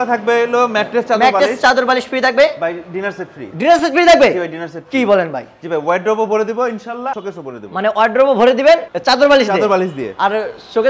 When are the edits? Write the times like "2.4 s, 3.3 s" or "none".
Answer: none